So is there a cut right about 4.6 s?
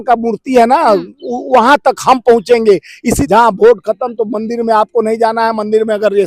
no; 1 cut; at 3.2 s

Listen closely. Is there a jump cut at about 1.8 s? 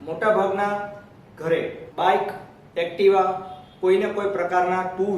yes; 1 cut; at 1.8 s

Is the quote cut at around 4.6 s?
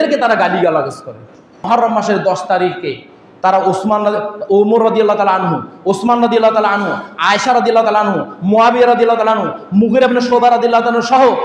no; 1 cut; at 1.7 s

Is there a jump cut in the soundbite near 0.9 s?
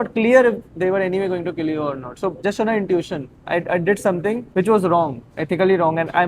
no; 2 cuts; at 2.4 s, 4.4 s

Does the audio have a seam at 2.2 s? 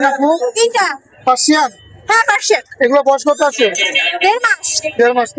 no; 0 cuts

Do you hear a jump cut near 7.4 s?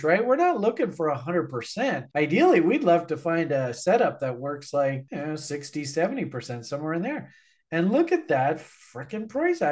no; 0 cuts

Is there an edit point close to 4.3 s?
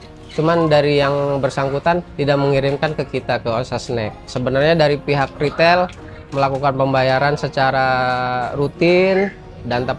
yes; 2 cuts; at 2.1 s, 4.3 s

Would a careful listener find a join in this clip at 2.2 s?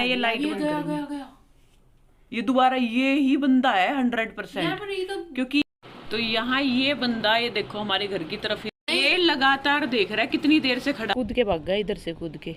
no; 3 cuts; at 5.6 s, 8.7 s, 11.1 s

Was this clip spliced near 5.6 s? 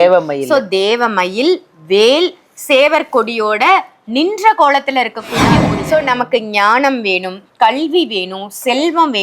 yes; 1 cut; at 5.6 s

